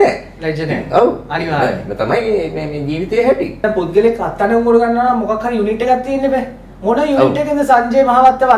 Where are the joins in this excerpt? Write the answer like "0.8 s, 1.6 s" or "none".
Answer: none

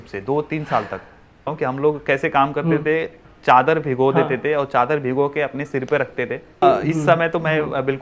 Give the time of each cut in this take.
1.5 s, 6.6 s

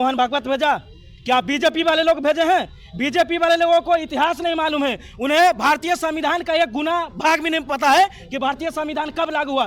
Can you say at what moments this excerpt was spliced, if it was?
none

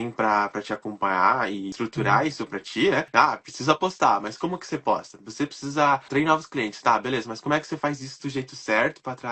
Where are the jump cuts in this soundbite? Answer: 1.7 s, 3.1 s, 6.1 s

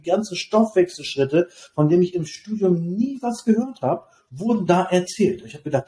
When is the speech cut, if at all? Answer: none

